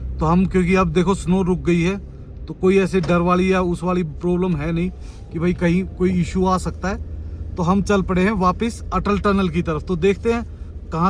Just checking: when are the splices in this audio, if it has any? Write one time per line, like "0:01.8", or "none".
none